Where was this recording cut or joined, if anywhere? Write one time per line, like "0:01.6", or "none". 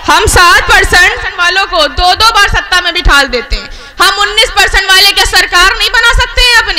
0:01.4